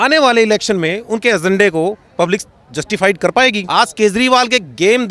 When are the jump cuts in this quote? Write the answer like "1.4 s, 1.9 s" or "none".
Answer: 3.6 s